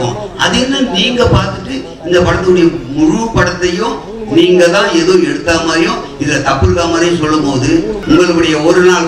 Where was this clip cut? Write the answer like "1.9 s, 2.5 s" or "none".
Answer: 8.0 s